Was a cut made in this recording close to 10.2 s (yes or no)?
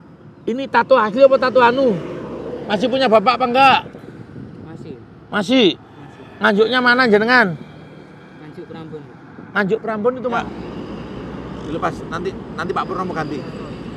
yes